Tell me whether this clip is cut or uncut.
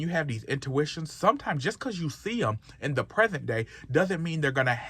uncut